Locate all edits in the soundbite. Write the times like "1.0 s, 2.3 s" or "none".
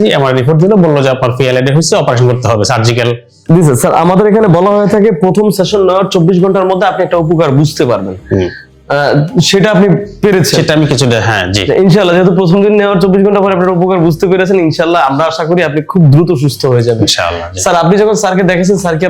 3.3 s